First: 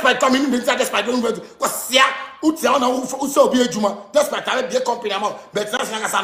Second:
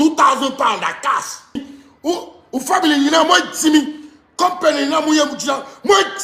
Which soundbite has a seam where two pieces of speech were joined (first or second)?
second